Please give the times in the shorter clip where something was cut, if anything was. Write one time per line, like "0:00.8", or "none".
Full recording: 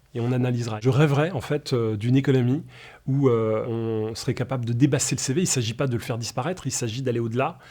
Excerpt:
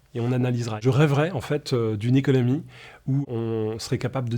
0:03.2